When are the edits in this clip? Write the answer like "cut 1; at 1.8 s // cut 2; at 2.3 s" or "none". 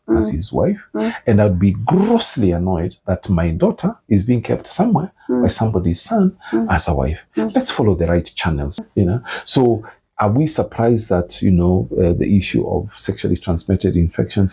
cut 1; at 8.8 s